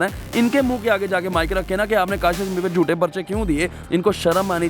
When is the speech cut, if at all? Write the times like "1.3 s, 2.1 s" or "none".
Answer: 3.8 s